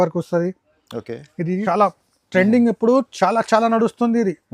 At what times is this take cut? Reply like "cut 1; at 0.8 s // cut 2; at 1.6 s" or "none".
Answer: cut 1; at 1.6 s